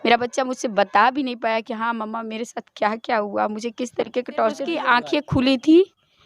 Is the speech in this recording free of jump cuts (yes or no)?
no